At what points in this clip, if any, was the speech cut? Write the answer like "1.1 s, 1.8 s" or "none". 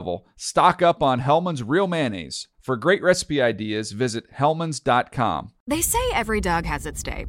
5.5 s